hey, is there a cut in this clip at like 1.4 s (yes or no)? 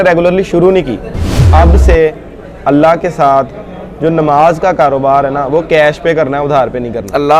yes